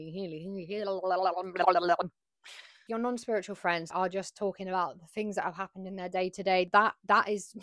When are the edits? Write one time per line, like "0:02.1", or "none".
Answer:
0:06.7

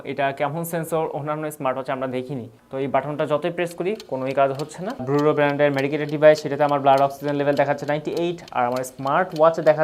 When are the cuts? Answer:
0:02.6
0:05.0

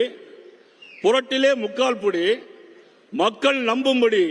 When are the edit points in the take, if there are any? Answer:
none

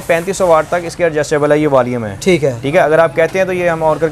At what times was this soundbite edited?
none

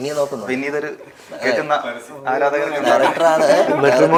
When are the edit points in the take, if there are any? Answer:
none

